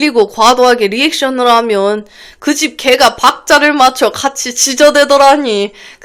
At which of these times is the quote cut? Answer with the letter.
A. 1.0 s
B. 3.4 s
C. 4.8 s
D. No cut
D